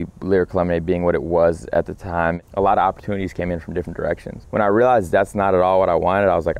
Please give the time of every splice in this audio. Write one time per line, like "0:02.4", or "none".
0:04.3